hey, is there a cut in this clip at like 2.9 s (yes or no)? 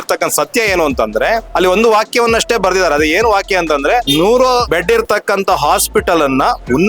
no